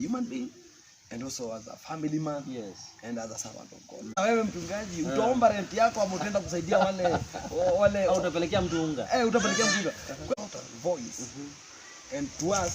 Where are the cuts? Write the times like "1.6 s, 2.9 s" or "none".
4.2 s, 10.3 s